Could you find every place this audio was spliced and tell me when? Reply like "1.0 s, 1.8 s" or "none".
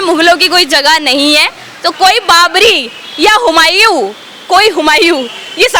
none